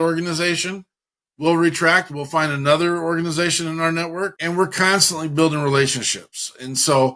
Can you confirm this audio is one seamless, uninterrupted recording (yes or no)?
no